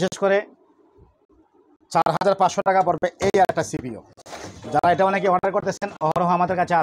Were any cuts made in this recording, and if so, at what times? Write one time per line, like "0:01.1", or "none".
none